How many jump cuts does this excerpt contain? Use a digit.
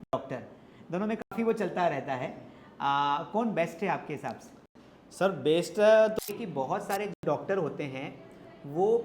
1